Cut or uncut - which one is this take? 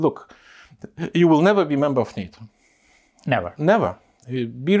uncut